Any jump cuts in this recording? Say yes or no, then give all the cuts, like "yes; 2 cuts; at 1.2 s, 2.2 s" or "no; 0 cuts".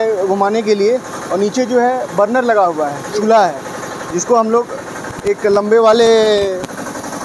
no; 0 cuts